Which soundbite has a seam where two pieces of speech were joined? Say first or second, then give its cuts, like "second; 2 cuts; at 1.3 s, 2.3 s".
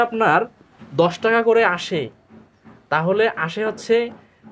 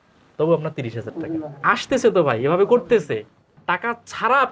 second; 1 cut; at 3.5 s